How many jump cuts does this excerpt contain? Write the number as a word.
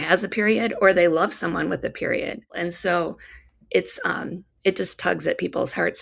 one